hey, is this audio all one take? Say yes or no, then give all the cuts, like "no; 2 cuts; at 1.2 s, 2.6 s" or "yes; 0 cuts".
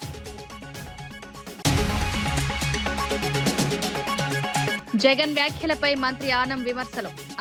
yes; 0 cuts